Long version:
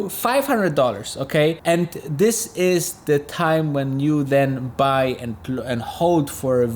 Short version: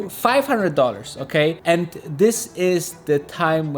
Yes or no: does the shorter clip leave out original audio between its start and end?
no